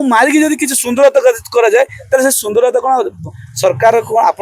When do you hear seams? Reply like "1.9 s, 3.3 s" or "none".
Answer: none